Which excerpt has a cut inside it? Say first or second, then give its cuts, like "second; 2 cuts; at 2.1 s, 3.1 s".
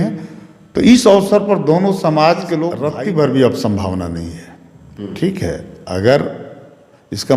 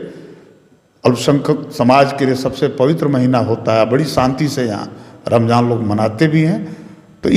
first; 1 cut; at 2.8 s